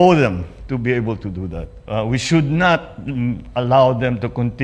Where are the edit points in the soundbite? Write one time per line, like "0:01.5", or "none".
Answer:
none